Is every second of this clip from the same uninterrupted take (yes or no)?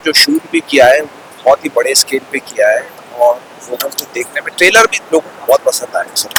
yes